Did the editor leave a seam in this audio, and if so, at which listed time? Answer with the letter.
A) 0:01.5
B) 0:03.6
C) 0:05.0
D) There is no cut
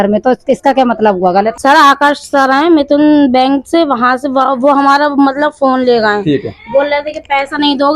A